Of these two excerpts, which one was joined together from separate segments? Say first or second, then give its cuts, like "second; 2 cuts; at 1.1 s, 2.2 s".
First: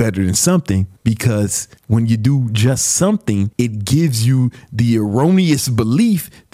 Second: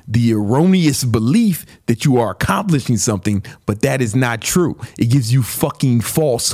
first; 3 cuts; at 0.9 s, 1.7 s, 3.5 s